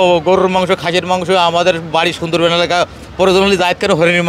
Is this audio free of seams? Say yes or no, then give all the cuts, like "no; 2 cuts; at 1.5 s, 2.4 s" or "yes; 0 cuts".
yes; 0 cuts